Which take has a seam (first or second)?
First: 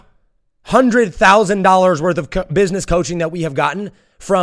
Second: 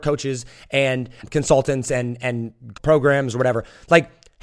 second